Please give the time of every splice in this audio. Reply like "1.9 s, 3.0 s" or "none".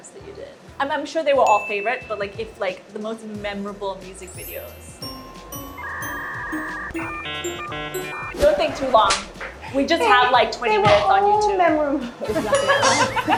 none